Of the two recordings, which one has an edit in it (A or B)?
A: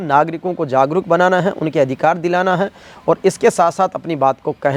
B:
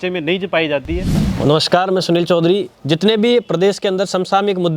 B